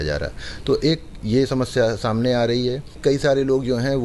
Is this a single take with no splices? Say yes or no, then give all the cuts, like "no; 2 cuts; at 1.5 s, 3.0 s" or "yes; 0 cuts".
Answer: no; 1 cut; at 2.9 s